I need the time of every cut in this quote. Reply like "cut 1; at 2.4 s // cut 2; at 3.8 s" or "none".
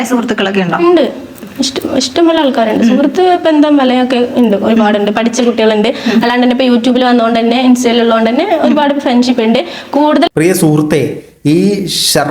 none